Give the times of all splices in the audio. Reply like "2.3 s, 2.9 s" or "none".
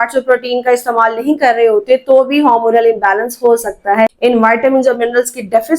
4.1 s